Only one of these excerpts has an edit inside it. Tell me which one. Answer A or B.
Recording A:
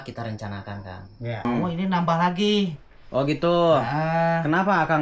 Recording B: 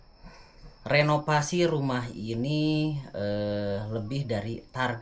A